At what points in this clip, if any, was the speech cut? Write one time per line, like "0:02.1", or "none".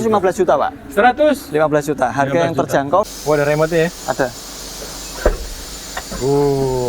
0:03.1